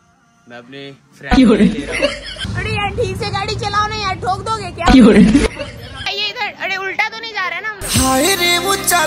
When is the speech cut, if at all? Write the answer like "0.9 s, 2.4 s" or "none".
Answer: 2.4 s, 6.1 s